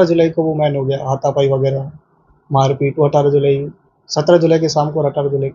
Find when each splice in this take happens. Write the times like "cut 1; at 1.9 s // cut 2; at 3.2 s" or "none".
none